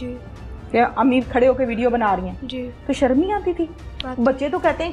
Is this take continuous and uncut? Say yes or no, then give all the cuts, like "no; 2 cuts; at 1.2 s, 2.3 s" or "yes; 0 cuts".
yes; 0 cuts